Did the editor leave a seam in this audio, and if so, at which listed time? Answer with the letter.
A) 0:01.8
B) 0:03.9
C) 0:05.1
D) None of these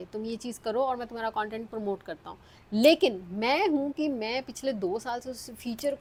D